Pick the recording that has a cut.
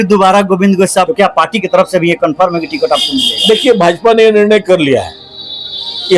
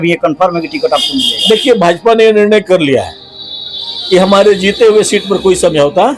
first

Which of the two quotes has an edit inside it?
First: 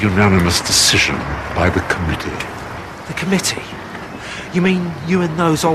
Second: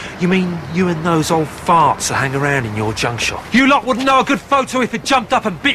second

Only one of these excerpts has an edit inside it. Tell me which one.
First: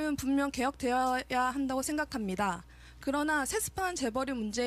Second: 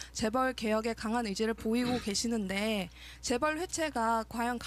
first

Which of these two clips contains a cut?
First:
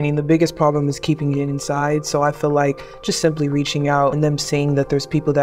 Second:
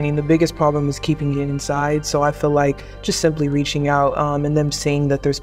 first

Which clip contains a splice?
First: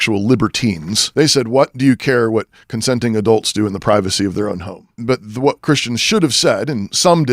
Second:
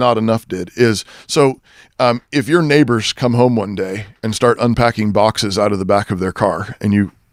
first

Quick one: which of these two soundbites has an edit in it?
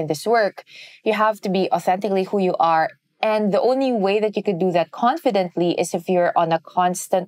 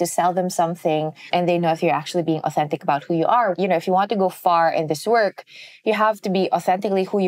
second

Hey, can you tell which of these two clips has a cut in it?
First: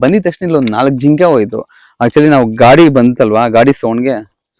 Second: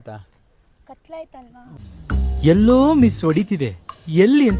second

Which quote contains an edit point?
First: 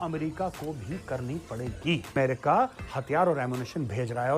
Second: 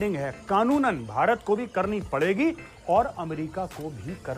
first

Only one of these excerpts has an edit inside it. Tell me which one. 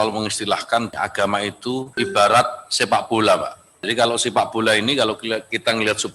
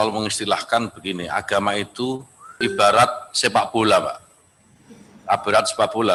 first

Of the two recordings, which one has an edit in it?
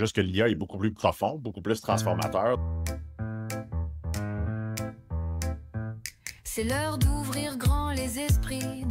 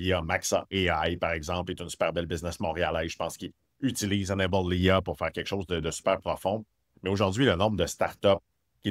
first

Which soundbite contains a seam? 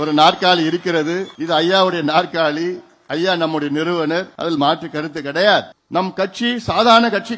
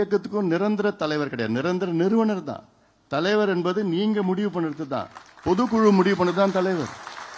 first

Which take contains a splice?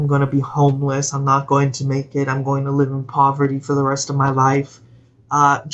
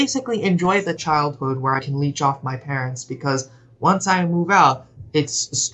second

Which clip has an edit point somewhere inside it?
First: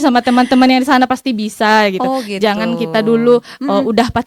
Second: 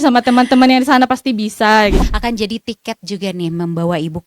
second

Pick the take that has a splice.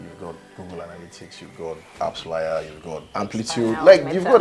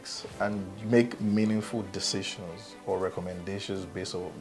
first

